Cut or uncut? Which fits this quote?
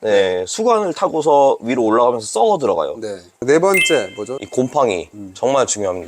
cut